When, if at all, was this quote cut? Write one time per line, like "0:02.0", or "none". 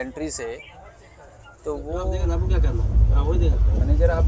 0:02.1